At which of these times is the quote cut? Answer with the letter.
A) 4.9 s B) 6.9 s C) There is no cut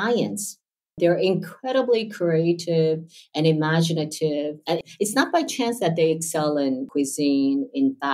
B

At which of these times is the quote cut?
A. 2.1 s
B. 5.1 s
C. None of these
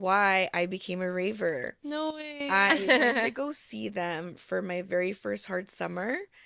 C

